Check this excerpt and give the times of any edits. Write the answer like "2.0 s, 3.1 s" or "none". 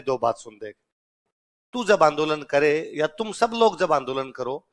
1.2 s